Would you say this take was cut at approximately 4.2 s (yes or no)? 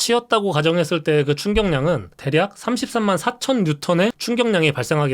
yes